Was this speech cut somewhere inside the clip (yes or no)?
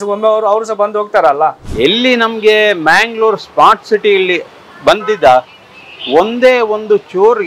yes